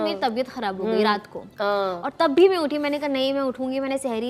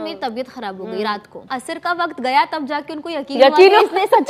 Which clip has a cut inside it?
second; 1 cut; at 1.5 s

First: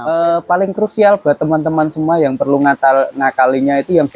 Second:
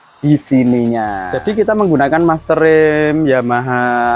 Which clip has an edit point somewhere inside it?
second; 1 cut; at 1.2 s

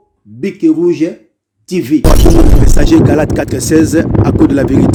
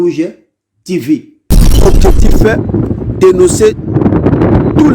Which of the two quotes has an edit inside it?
second; 1 cut; at 1.2 s

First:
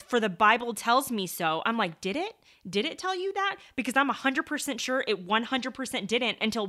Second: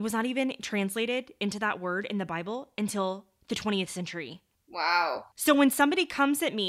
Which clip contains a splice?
second; 1 cut; at 5.4 s

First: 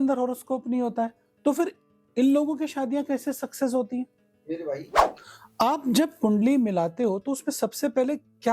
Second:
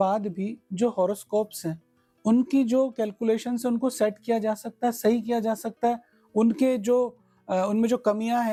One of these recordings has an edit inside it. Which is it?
first; 1 cut; at 5.0 s

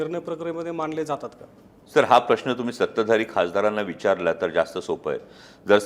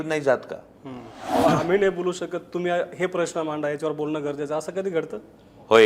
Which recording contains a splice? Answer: second; 1 cut; at 1.4 s

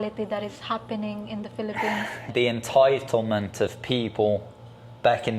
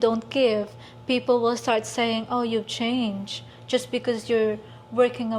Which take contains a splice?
first; 1 cut; at 2.3 s

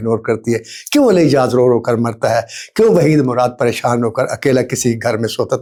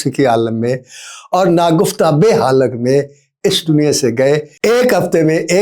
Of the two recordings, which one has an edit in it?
second; 1 cut; at 4.5 s

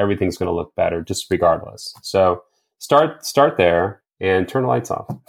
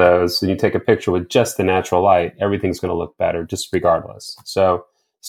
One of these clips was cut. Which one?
first; 1 cut; at 4.0 s

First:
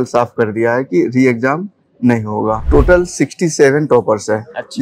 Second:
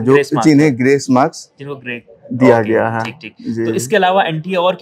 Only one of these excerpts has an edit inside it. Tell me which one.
first; 1 cut; at 2.6 s

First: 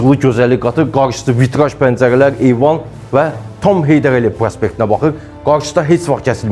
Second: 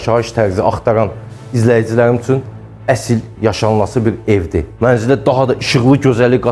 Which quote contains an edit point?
second; 1 cut; at 4.7 s

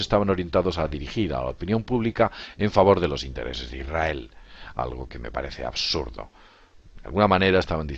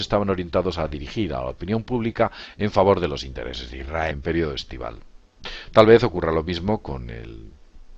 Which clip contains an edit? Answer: first; 1 cut; at 4.1 s

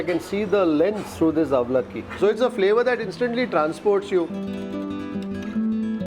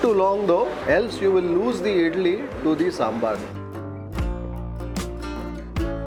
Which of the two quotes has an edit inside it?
first; 2 cuts; at 1.1 s, 2.1 s

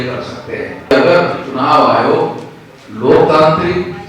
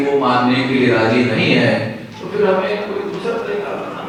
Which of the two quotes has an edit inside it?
first; 1 cut; at 0.9 s

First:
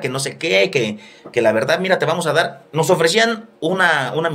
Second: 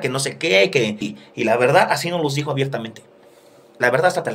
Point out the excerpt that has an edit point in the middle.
second; 1 cut; at 1.2 s

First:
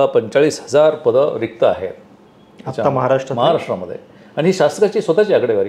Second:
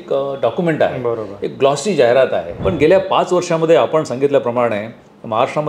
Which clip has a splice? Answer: second; 1 cut; at 2.5 s

